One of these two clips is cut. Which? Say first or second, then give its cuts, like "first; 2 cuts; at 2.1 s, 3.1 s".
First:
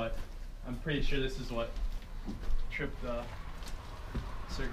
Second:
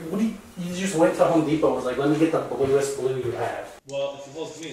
second; 1 cut; at 3.8 s